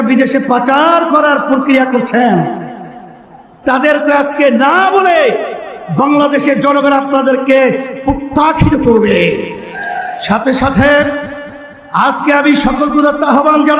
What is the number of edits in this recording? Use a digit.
0